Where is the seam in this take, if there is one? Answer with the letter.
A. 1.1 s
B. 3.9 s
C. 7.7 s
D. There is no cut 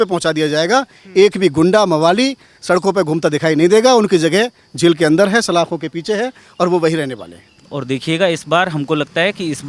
C